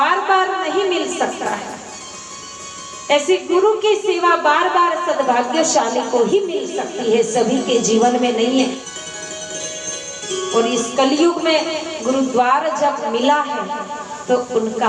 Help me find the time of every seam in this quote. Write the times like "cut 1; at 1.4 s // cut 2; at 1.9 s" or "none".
cut 1; at 8.9 s